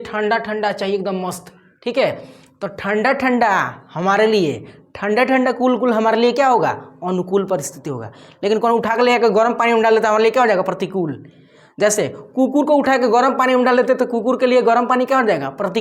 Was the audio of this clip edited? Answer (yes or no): no